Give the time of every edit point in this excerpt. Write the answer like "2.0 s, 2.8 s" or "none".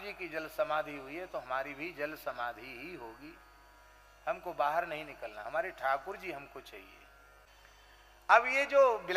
7.5 s